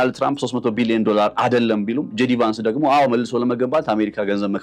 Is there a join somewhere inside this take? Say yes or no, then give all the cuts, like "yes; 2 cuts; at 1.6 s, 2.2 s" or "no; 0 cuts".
no; 0 cuts